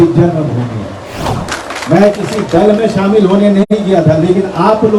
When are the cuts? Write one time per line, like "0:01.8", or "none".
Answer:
0:01.4